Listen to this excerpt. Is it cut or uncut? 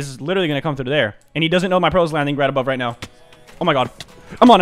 uncut